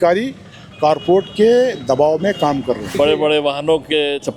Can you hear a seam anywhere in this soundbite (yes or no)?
yes